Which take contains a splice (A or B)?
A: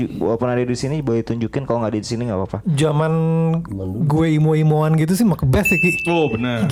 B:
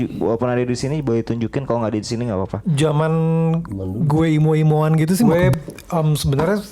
B